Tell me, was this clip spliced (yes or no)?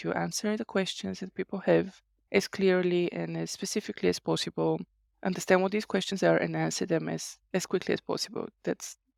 no